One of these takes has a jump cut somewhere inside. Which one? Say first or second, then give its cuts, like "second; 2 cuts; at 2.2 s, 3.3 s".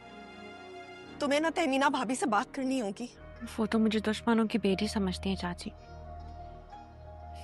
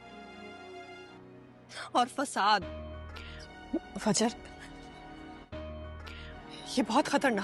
second; 1 cut; at 1.0 s